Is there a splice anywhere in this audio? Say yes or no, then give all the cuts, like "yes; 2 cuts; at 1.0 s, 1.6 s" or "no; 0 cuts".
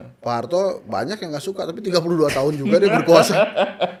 no; 0 cuts